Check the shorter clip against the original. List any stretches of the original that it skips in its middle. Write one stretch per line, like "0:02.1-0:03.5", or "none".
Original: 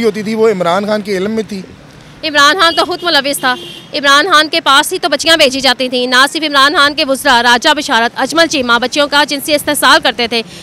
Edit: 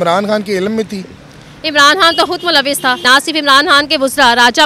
0:03.6-0:06.1